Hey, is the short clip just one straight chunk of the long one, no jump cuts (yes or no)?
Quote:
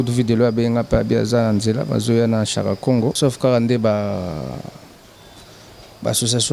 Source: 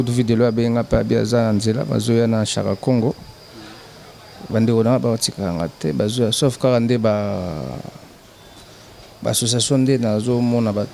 no